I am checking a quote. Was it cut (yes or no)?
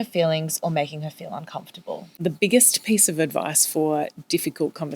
yes